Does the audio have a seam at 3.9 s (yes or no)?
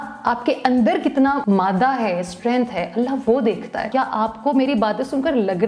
yes